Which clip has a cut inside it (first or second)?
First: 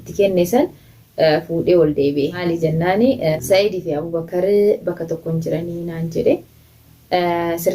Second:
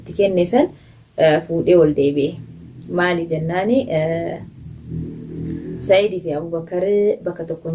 first